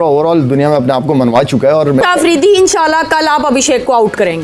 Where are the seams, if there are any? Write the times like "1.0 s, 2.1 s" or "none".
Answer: 2.0 s